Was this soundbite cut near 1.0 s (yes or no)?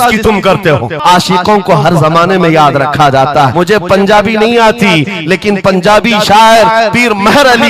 yes